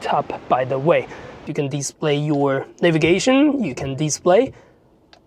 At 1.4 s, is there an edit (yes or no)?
yes